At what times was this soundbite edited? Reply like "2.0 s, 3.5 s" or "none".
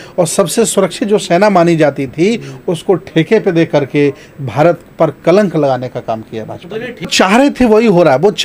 7.1 s